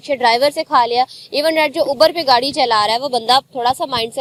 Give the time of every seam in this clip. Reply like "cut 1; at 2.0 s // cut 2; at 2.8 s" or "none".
none

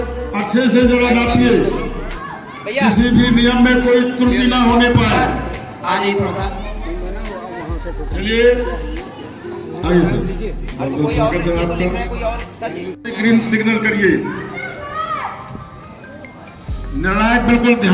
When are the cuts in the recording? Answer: cut 1; at 13.0 s

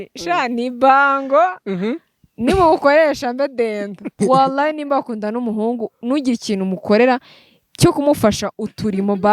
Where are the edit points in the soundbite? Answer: cut 1; at 4.2 s

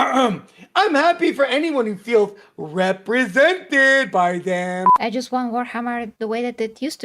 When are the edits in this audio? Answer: cut 1; at 4.9 s // cut 2; at 6.1 s

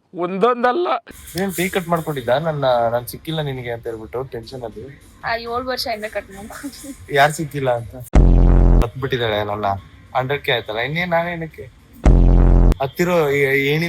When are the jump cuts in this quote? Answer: cut 1; at 1.2 s // cut 2; at 5.2 s // cut 3; at 8.9 s

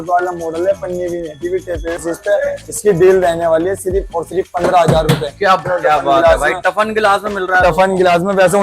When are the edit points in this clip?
cut 1; at 2.0 s // cut 2; at 5.6 s

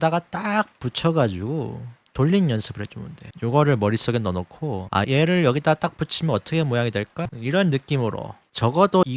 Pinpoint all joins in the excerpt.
cut 1; at 7.2 s

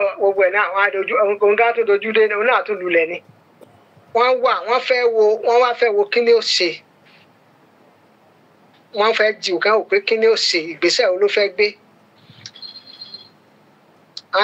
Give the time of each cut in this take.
cut 1; at 3.5 s

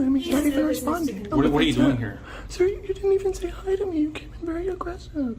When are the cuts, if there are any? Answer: cut 1; at 1.3 s // cut 2; at 3.4 s

